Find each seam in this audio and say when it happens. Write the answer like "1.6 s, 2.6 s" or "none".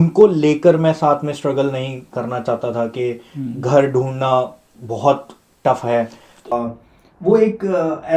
6.5 s